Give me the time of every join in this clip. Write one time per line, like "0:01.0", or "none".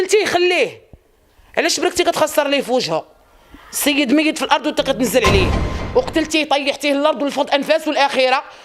0:05.7